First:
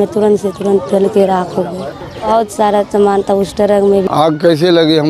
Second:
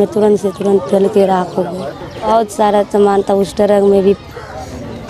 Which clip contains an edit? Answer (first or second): first